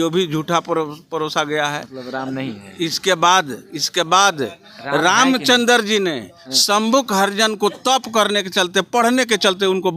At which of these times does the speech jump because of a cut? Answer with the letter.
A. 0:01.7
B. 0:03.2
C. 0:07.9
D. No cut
D